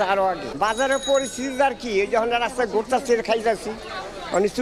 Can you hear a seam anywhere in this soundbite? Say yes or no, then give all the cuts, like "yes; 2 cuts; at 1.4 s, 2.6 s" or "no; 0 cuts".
no; 0 cuts